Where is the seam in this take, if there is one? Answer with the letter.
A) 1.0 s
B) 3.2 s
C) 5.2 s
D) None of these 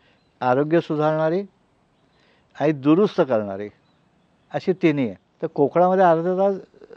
C